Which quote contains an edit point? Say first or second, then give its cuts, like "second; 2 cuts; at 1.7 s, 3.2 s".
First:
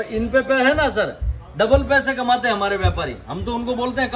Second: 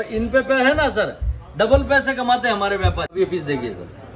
second; 1 cut; at 3.1 s